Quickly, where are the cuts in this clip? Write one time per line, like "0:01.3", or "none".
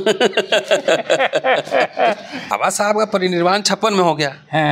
0:02.5

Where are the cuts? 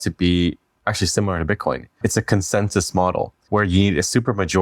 0:02.0
0:03.4

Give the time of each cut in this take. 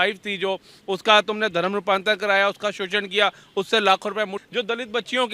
0:04.4

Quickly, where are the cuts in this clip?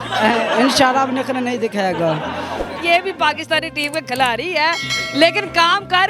0:02.7

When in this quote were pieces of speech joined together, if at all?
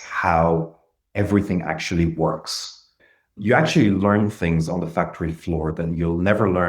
0:03.0

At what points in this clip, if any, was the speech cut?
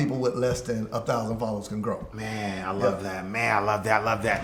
none

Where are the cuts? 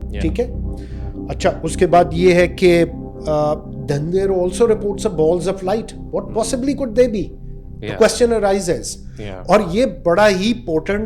none

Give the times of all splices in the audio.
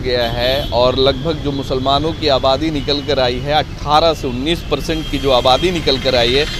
none

